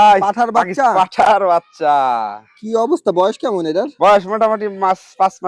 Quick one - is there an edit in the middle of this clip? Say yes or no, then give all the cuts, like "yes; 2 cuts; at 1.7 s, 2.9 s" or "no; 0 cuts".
no; 0 cuts